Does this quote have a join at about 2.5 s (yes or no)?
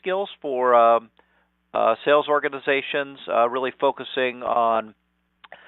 yes